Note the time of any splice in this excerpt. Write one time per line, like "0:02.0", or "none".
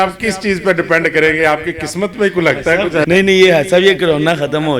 0:03.0